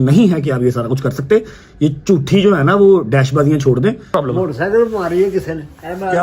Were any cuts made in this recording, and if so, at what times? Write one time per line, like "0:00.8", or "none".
0:04.1